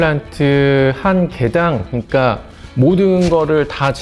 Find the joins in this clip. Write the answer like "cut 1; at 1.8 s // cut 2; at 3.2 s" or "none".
none